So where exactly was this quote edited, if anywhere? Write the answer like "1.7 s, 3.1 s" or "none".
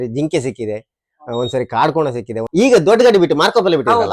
2.4 s

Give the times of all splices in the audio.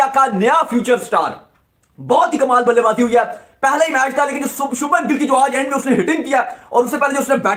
none

